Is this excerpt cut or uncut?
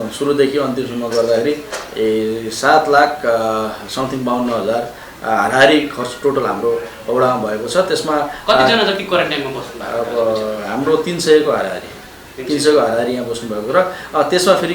uncut